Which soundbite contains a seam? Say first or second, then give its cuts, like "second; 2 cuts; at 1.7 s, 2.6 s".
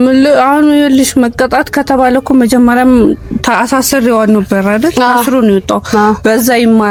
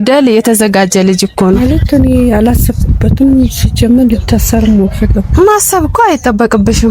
second; 1 cut; at 1.6 s